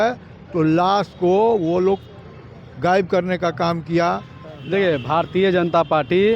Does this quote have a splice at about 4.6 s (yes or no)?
yes